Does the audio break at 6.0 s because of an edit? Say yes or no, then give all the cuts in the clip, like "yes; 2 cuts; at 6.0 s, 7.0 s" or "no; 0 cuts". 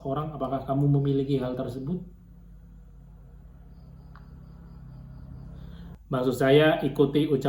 yes; 1 cut; at 6.0 s